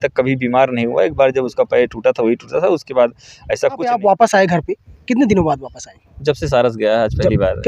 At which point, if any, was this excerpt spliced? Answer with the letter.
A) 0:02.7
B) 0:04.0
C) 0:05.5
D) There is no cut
B